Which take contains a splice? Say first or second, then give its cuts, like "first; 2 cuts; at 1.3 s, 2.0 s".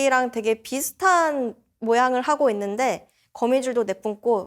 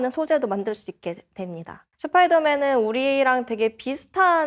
second; 1 cut; at 1.8 s